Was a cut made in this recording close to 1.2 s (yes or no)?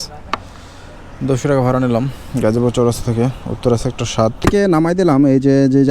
no